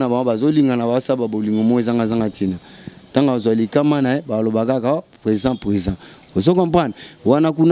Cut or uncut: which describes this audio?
uncut